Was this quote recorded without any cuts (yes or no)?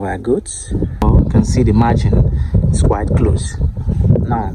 no